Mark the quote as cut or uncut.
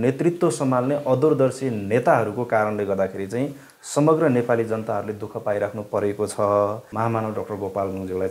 cut